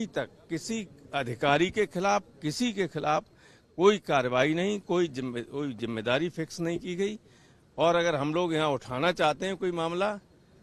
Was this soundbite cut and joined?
no; 0 cuts

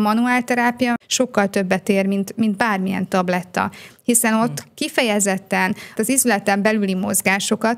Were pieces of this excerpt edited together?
yes; 1 cut; at 1.0 s

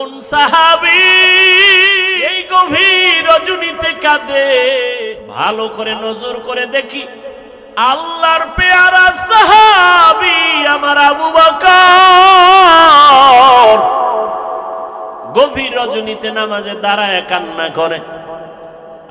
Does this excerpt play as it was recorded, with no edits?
no; 2 cuts; at 2.3 s, 5.0 s

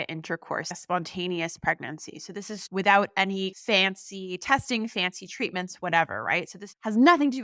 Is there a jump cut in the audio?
no; 0 cuts

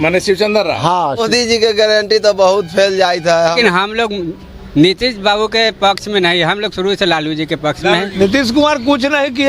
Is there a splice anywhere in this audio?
yes; 3 cuts; at 1.2 s, 3.6 s, 8.2 s

